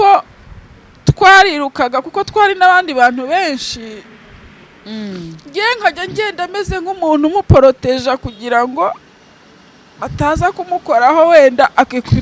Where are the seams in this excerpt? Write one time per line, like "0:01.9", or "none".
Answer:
none